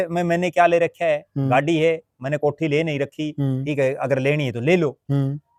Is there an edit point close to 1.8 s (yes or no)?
no